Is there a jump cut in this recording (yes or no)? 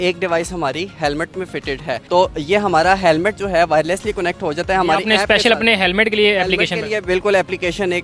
no